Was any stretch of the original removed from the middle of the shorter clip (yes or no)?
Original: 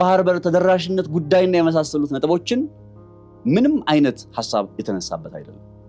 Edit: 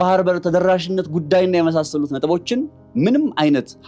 yes